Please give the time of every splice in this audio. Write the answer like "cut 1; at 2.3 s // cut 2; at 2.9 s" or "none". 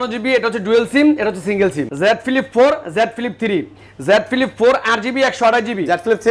cut 1; at 1.9 s